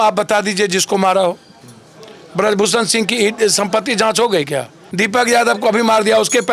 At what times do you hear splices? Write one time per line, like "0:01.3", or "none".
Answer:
0:04.8